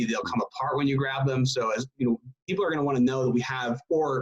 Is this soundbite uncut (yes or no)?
yes